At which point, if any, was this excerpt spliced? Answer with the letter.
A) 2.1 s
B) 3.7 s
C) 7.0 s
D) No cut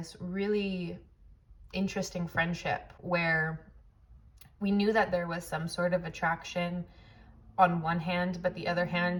D